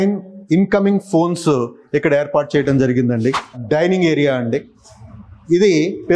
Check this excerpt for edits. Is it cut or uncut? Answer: cut